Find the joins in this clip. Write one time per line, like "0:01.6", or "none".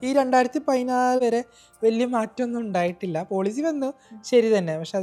0:01.2